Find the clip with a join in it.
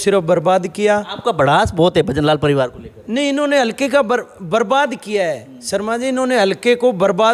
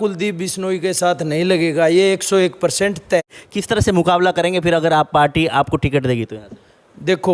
second; 1 cut; at 3.4 s

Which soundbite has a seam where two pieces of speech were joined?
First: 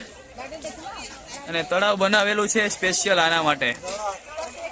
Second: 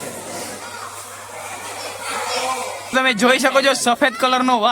second; 1 cut; at 2.9 s

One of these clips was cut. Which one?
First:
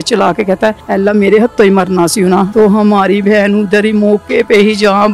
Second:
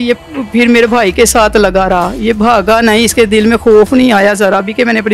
first; 2 cuts; at 0.8 s, 2.5 s

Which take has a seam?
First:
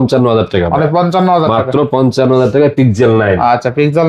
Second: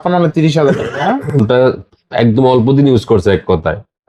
second; 1 cut; at 1.3 s

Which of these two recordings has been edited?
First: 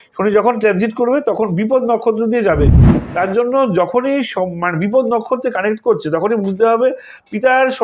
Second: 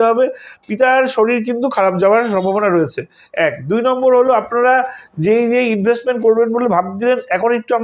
first; 1 cut; at 2.9 s

